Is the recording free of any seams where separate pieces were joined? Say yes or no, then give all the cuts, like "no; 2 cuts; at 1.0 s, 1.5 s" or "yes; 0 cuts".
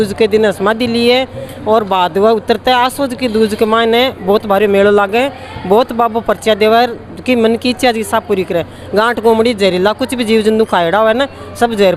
yes; 0 cuts